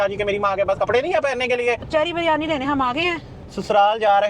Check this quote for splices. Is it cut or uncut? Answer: cut